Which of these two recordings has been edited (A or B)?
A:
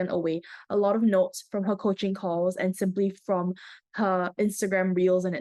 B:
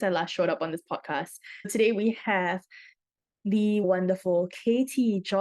B